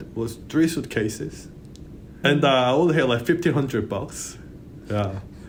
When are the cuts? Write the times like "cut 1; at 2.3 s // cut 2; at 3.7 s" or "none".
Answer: none